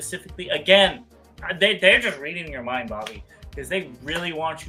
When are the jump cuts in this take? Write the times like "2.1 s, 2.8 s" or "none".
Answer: none